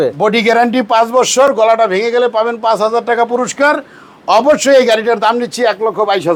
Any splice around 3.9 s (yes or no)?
no